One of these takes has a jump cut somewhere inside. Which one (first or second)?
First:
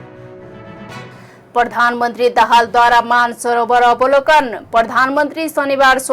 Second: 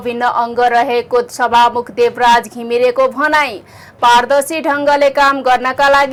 first